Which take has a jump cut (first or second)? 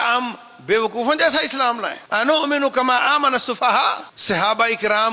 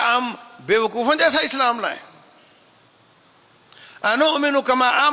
first